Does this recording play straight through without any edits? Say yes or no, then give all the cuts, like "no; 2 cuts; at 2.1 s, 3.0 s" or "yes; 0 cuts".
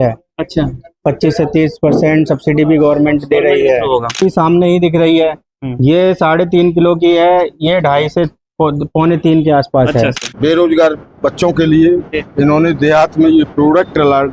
no; 2 cuts; at 4.2 s, 10.2 s